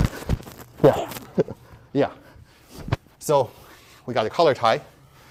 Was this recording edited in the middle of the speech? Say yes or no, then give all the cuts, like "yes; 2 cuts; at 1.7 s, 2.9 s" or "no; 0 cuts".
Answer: no; 0 cuts